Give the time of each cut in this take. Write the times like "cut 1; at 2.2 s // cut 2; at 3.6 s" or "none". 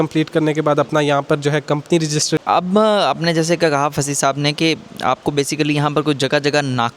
cut 1; at 2.4 s